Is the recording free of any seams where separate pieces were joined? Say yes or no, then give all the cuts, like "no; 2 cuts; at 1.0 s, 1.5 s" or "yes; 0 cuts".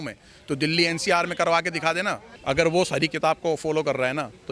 no; 1 cut; at 2.3 s